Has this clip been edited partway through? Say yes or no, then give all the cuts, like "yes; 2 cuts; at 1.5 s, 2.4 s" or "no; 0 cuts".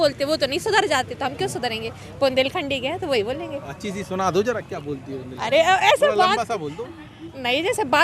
no; 0 cuts